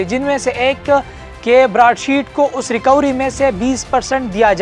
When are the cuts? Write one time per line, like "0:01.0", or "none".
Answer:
none